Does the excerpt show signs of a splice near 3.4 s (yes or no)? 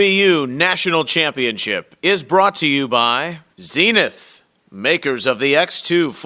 yes